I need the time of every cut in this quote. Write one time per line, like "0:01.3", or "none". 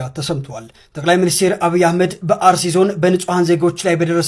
none